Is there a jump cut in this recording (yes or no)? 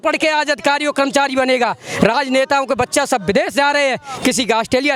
no